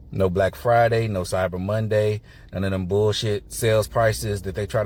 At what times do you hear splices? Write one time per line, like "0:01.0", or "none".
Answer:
none